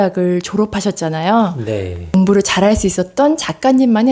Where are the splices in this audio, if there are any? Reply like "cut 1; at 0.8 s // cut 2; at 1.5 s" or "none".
none